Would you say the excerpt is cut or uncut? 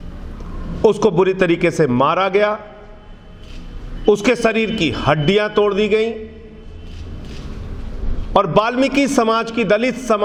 uncut